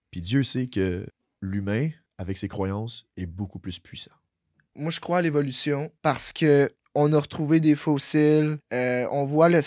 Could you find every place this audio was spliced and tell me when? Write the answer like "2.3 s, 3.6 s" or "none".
1.2 s, 2.1 s, 4.6 s, 5.9 s, 6.8 s, 8.6 s